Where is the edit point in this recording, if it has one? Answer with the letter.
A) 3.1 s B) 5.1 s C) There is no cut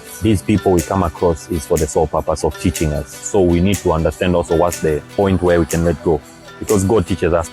B